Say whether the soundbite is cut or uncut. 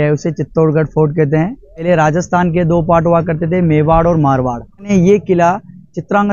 cut